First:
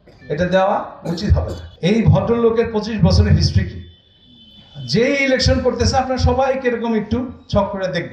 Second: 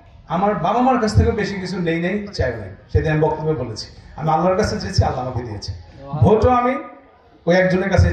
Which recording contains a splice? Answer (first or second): first